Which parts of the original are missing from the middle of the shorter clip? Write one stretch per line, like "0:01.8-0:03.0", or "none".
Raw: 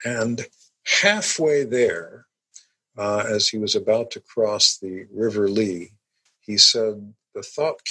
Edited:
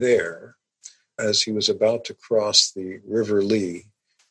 0:02.9-0:03.2